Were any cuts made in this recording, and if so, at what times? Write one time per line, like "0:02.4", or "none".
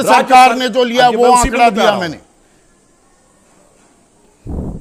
none